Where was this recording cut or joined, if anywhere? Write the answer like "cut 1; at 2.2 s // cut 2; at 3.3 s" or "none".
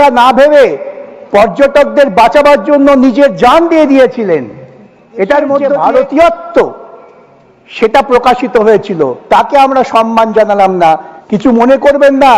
cut 1; at 5.7 s // cut 2; at 11.1 s